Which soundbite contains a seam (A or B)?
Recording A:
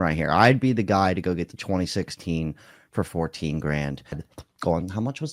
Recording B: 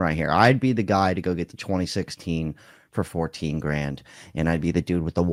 A